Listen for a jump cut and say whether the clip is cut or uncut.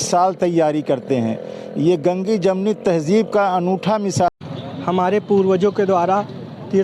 cut